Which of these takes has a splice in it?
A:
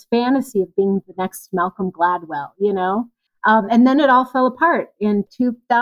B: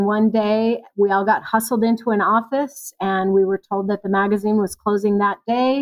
A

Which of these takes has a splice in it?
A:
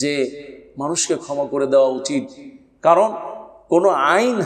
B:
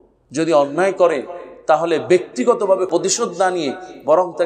B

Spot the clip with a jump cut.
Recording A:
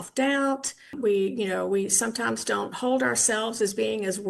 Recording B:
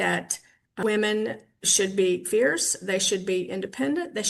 A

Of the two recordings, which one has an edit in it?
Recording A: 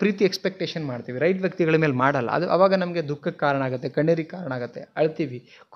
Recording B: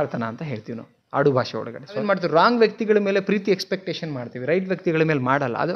B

